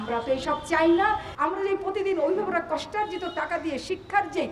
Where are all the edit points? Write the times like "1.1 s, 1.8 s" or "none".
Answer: 1.3 s